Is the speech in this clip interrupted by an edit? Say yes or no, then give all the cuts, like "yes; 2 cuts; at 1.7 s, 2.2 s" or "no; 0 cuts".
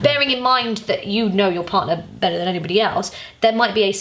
no; 0 cuts